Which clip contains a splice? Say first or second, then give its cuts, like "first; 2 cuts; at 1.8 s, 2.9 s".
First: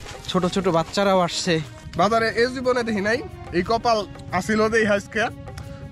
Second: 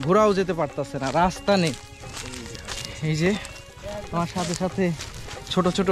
first; 1 cut; at 1.8 s